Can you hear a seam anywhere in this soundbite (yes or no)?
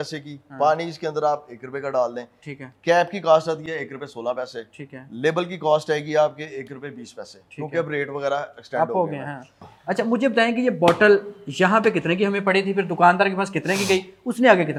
no